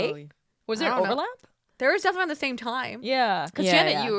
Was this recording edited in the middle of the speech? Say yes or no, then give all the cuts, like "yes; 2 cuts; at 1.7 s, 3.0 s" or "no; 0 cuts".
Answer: no; 0 cuts